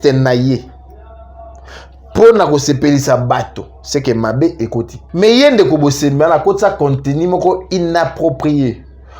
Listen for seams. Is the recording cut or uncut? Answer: cut